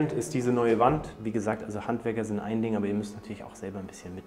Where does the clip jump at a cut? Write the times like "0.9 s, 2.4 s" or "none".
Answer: 1.1 s